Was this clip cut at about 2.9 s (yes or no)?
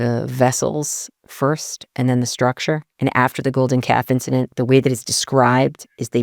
yes